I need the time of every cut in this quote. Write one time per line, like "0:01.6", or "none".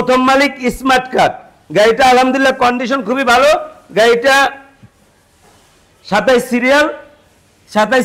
none